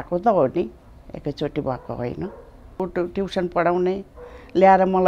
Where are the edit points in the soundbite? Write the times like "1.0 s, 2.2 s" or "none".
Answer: 2.8 s